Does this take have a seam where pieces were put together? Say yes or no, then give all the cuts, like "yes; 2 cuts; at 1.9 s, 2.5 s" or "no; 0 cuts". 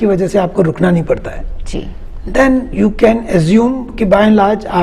no; 0 cuts